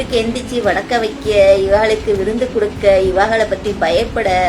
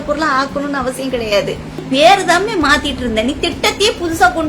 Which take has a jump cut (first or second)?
second